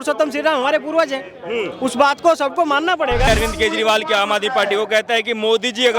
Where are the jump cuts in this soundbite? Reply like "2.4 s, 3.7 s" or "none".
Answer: 3.3 s